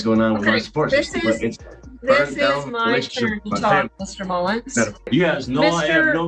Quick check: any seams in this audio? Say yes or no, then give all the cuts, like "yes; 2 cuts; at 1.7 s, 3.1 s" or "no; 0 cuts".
yes; 1 cut; at 5.1 s